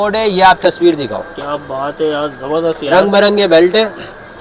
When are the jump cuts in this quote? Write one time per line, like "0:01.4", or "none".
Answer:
none